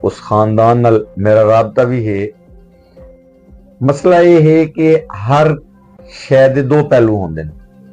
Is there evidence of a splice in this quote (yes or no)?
no